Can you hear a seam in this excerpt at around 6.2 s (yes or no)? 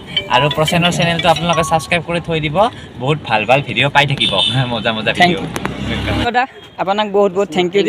yes